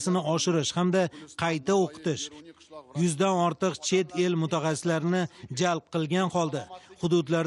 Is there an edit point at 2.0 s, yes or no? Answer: yes